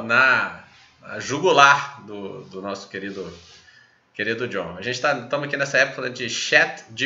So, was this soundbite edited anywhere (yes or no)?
no